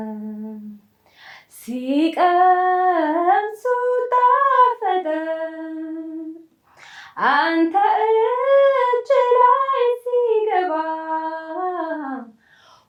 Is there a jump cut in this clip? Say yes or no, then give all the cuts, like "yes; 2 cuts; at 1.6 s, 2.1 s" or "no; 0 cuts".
no; 0 cuts